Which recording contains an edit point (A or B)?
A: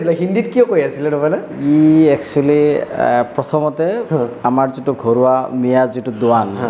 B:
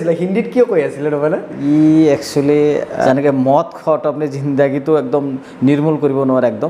B